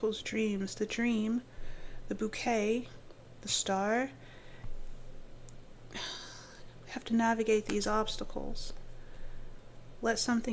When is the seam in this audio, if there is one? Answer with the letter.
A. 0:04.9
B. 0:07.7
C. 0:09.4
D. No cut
D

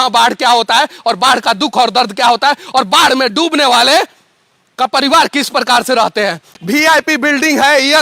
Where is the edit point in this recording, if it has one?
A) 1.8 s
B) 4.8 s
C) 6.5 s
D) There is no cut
C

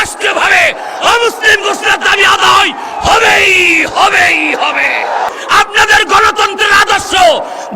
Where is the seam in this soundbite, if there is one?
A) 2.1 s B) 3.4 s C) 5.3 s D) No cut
C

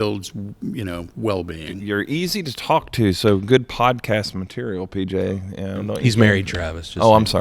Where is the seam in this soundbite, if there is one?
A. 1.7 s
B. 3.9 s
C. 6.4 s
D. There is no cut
A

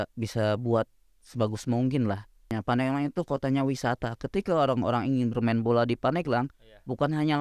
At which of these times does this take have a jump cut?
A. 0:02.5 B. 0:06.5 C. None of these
A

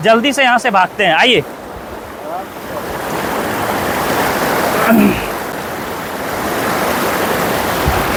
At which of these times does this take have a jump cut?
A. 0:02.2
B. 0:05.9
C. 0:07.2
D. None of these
D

